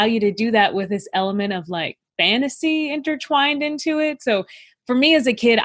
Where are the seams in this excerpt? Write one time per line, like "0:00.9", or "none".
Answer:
0:04.7

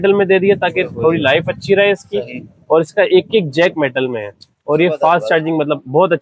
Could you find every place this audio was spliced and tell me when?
none

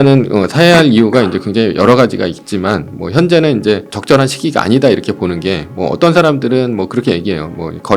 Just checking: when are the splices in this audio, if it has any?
0:03.9

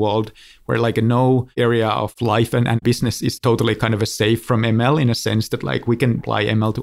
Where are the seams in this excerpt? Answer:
0:04.4

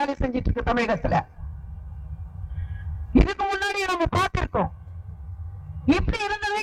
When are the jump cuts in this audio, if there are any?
none

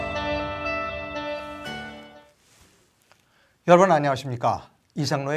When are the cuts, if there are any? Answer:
0:02.2

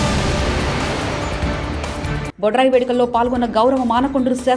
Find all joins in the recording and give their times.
0:01.8

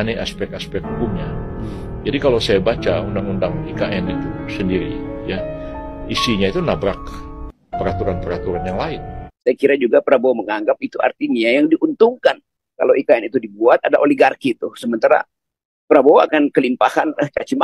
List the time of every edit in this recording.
0:09.2

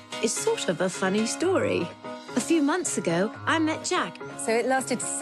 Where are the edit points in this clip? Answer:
none

